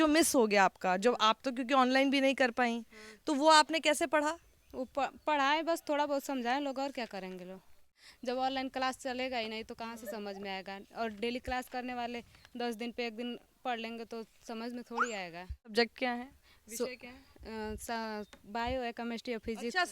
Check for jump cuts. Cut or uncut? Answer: cut